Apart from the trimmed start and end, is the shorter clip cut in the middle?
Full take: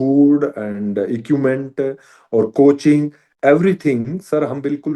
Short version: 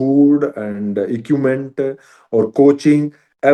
no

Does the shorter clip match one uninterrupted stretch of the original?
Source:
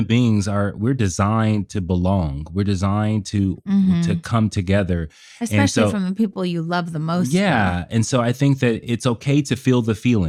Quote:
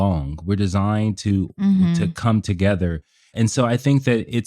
no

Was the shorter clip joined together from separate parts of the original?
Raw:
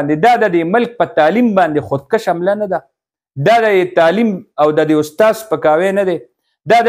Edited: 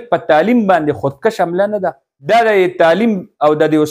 yes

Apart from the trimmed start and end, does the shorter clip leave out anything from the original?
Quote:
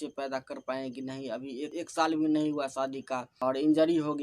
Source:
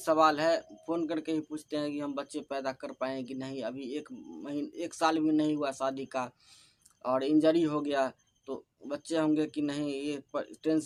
yes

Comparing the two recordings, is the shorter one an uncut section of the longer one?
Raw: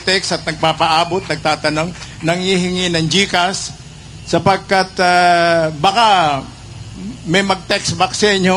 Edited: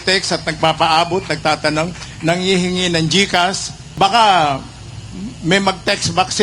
no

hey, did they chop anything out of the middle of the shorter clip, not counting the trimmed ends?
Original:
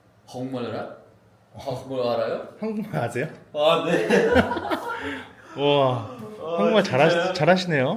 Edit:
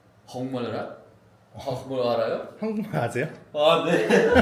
no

